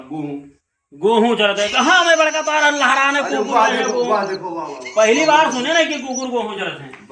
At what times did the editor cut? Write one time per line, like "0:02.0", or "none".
none